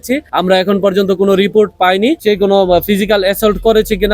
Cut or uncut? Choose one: cut